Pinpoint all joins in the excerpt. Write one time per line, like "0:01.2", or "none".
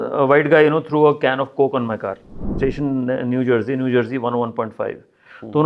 0:02.5